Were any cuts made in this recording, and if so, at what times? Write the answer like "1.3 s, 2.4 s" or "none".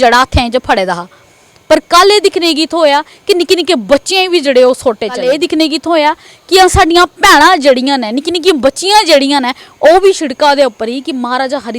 5.2 s